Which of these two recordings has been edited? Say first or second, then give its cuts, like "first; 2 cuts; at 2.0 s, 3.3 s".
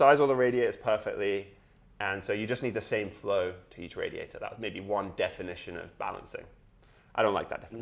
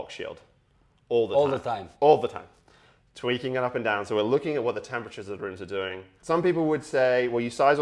second; 1 cut; at 6.1 s